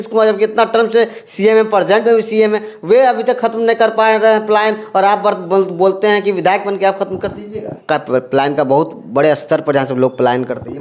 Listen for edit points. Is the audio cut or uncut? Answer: cut